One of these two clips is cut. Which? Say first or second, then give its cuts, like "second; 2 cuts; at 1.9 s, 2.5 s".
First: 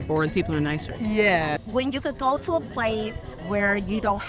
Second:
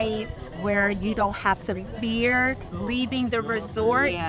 first; 1 cut; at 1.6 s